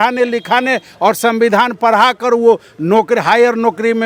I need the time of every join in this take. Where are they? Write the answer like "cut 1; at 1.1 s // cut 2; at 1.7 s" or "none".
none